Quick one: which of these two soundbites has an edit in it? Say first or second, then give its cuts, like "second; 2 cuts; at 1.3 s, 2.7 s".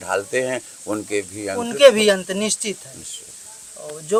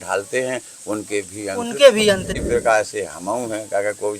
second; 1 cut; at 2.3 s